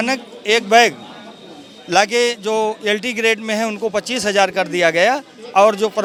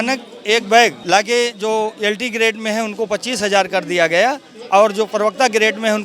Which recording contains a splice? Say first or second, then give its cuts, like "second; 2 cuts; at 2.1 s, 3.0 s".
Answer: second; 1 cut; at 1.0 s